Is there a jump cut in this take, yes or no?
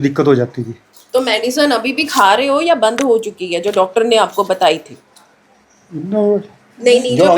no